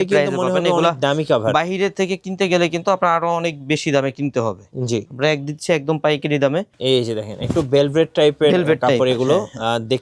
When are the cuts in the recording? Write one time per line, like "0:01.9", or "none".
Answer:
0:06.7